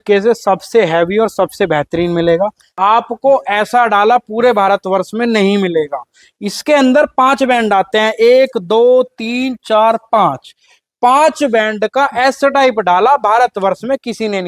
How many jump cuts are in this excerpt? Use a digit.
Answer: 1